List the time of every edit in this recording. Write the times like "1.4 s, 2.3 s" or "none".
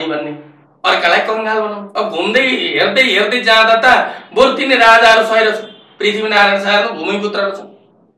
1.8 s